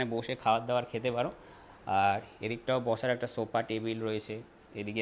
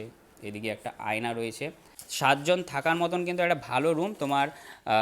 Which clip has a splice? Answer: second; 1 cut; at 2.1 s

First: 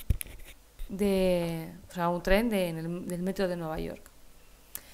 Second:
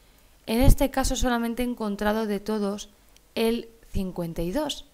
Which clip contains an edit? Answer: first; 1 cut; at 1.5 s

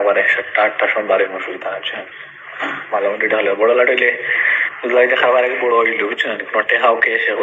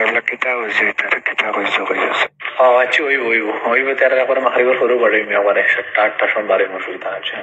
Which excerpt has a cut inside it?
second; 1 cut; at 2.4 s

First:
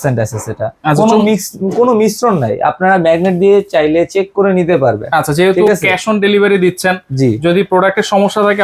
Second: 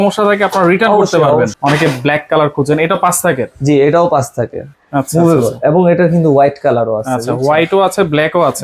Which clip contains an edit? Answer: second; 2 cuts; at 1.5 s, 4.7 s

